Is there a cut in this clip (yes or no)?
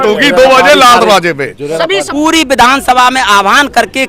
yes